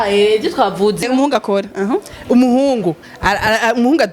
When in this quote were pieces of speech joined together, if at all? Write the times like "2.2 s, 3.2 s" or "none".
1.0 s